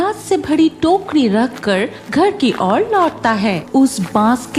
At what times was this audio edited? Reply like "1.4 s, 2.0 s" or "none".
3.6 s